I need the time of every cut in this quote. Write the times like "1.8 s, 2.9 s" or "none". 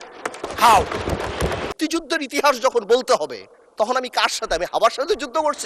1.7 s